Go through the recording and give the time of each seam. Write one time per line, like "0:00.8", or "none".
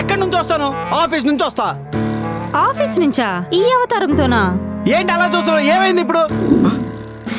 none